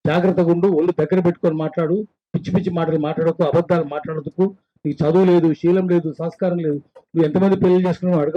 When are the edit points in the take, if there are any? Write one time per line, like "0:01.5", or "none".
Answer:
none

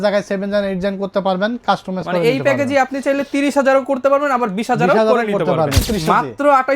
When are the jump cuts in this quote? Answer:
0:05.9

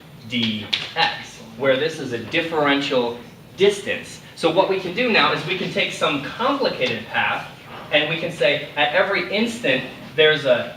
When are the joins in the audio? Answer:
none

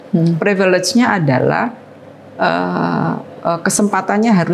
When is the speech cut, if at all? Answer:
none

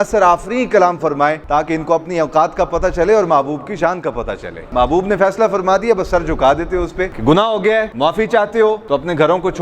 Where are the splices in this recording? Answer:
0:01.4
0:04.5
0:07.1

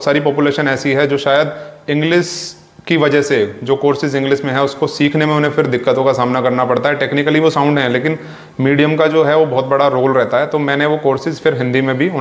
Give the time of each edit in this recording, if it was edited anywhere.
none

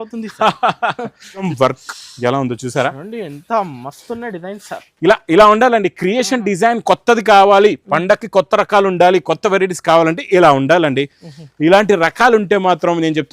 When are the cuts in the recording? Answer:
0:01.5

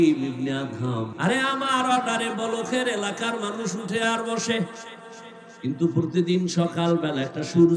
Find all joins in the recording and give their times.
0:01.1

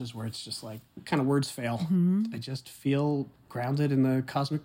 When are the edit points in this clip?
0:01.8
0:02.4

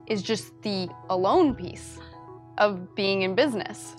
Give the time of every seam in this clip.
none

